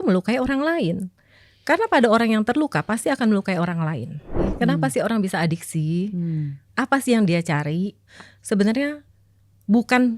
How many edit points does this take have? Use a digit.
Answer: 2